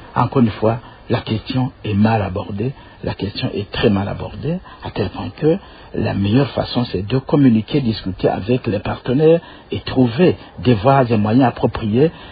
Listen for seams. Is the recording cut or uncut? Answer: uncut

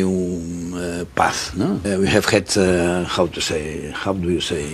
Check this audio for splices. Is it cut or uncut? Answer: cut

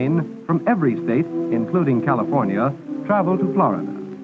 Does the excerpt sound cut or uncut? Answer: cut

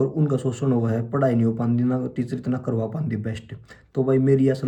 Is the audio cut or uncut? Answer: uncut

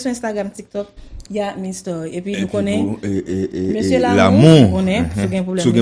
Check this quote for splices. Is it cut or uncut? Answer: uncut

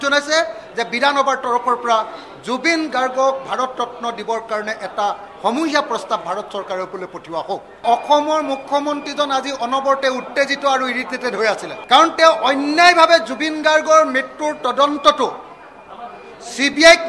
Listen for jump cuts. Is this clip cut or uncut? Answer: cut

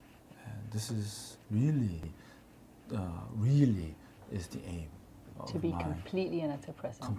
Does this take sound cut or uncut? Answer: cut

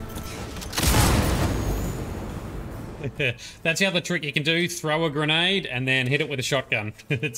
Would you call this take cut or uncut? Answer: uncut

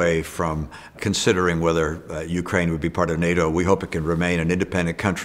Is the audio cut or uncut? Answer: cut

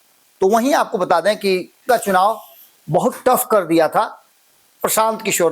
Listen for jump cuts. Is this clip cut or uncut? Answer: cut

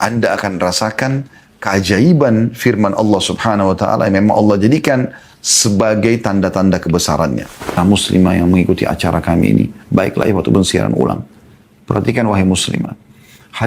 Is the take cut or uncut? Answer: cut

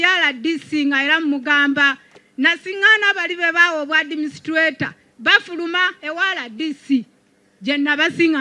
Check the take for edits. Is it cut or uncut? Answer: uncut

